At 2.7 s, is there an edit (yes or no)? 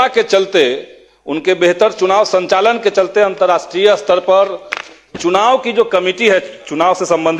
no